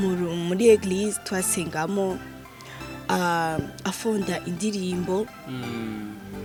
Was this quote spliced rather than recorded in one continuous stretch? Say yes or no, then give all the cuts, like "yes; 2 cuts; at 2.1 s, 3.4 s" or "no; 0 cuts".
no; 0 cuts